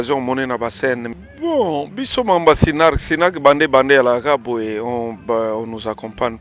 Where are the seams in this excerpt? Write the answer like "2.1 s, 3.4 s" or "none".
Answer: 1.2 s